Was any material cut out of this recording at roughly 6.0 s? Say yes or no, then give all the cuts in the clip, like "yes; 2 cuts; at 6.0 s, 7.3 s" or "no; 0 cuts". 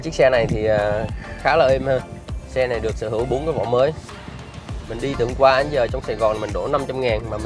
no; 0 cuts